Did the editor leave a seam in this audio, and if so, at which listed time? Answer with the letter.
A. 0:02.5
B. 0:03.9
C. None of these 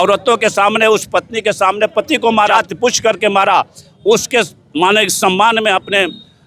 A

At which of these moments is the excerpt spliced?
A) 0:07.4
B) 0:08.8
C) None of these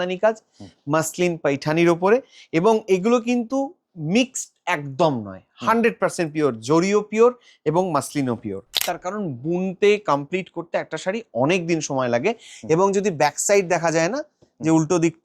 B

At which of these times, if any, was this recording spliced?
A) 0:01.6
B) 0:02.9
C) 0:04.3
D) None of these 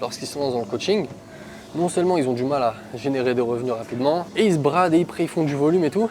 C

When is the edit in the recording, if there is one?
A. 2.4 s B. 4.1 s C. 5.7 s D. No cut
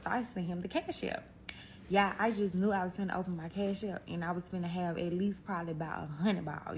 A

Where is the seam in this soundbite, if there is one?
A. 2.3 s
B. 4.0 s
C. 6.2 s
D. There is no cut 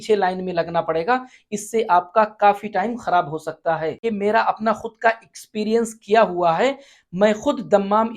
B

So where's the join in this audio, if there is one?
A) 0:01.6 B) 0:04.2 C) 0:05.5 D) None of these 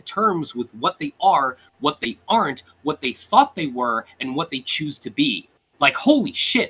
D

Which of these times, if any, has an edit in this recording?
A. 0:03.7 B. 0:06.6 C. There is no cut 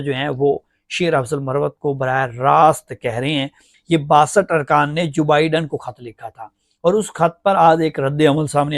A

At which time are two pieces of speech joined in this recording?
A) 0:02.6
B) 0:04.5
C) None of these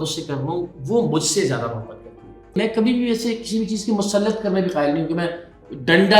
A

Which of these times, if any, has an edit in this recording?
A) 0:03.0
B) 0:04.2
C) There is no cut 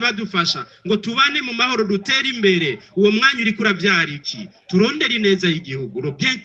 C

